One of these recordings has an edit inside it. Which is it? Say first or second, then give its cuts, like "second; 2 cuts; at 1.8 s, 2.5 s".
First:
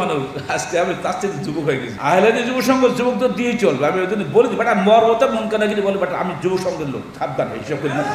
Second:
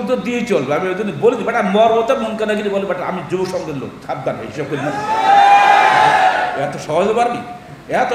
first; 1 cut; at 1.9 s